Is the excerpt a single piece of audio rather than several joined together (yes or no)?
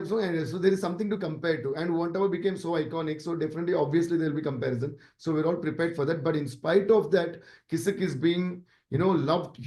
yes